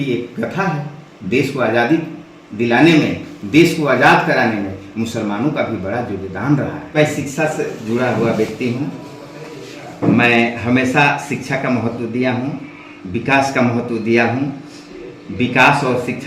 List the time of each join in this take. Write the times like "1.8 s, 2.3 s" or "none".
7.0 s